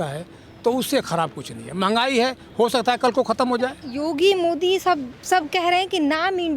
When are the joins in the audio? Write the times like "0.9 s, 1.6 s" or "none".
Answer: none